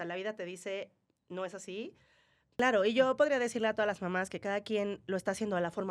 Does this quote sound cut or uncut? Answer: cut